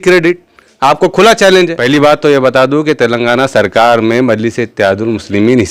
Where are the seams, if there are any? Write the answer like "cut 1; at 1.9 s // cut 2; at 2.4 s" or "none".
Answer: cut 1; at 1.8 s